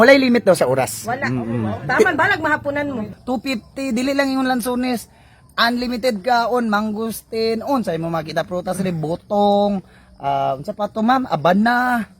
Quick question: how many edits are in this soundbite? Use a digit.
1